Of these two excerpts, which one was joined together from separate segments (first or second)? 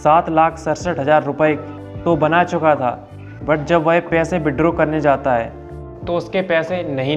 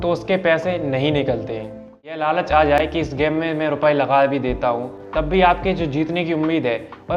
second